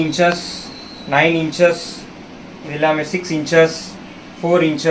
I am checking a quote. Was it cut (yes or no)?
no